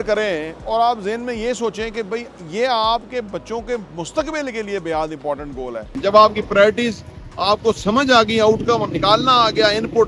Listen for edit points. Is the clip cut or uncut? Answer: cut